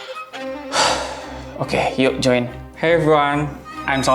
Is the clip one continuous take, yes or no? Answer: no